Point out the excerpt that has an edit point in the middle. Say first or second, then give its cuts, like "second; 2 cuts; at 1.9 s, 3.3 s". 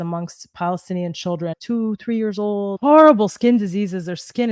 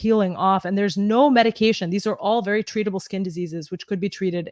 first; 2 cuts; at 1.6 s, 2.7 s